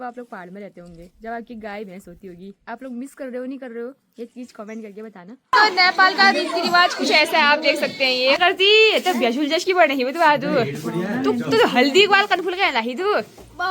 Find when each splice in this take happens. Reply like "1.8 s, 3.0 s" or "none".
5.5 s, 8.4 s